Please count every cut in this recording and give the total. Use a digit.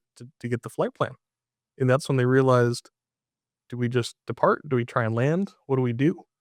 0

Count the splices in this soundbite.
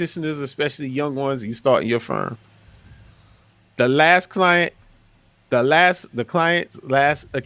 0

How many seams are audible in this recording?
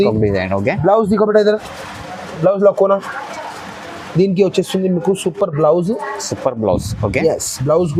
0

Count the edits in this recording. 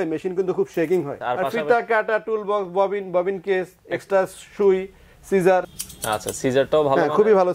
2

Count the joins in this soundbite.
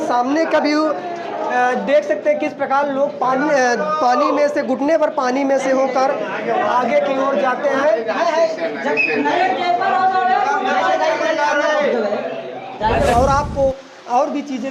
1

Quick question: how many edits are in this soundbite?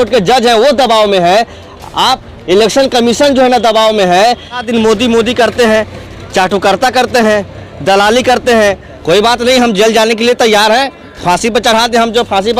2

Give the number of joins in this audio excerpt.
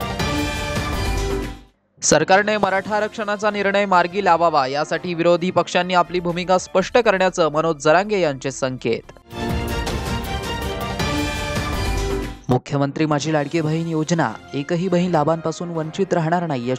1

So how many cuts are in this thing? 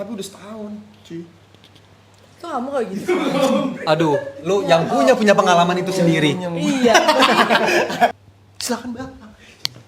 1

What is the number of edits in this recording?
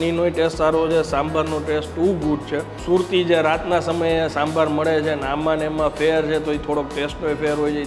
1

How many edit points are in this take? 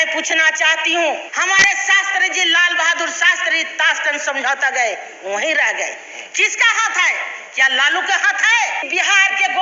2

